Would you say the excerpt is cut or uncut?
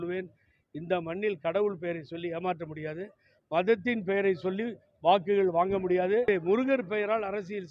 cut